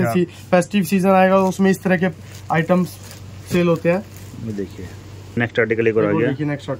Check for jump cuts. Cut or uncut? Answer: cut